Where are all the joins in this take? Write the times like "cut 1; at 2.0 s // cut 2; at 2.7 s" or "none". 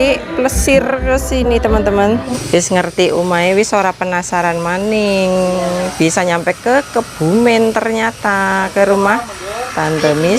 cut 1; at 2.3 s